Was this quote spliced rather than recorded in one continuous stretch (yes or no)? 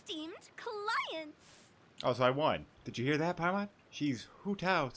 yes